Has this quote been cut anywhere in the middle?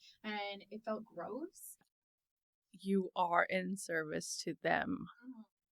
yes; 1 cut; at 1.8 s

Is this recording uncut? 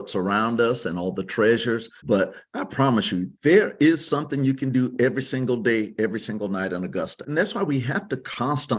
no; 2 cuts; at 1.9 s, 7.2 s

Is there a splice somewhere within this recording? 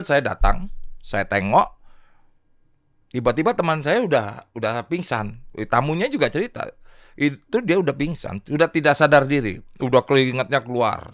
no; 0 cuts

